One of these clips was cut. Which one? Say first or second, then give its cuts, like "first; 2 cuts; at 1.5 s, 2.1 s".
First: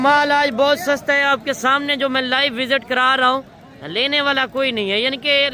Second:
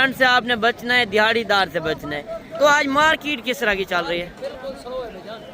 second; 1 cut; at 2.4 s